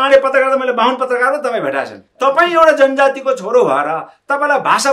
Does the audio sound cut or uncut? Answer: cut